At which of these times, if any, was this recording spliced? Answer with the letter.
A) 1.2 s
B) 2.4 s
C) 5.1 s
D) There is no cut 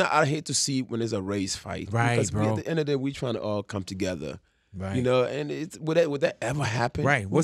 D